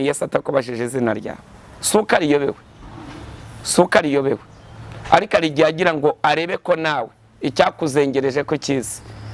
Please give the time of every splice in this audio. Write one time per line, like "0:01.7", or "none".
none